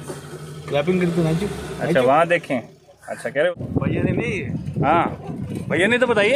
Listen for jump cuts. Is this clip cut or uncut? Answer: cut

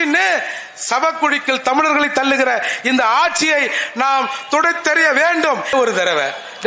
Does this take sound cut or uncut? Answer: cut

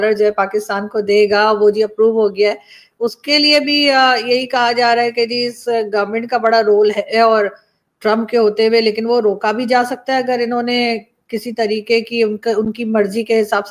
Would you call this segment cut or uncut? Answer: uncut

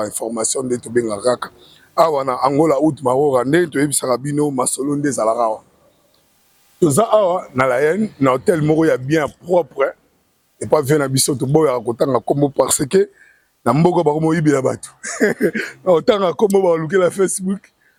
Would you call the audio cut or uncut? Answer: uncut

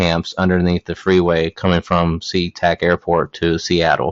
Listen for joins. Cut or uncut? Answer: uncut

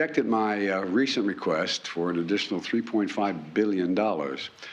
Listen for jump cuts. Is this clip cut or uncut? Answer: uncut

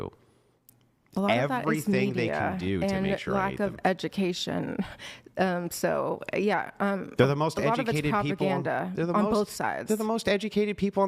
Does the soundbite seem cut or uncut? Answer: uncut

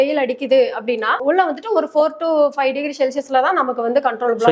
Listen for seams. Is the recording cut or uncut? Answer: cut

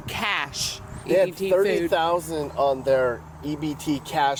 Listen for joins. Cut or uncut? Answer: uncut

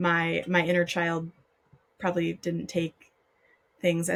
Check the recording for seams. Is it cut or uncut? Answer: uncut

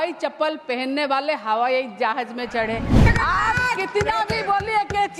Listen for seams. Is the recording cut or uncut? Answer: cut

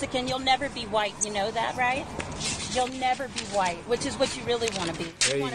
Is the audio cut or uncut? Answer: uncut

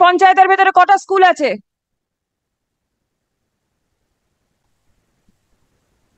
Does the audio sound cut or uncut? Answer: uncut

